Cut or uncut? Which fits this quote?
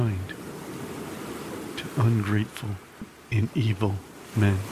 uncut